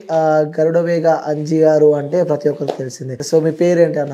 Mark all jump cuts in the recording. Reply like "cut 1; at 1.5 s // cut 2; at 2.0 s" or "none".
cut 1; at 3.2 s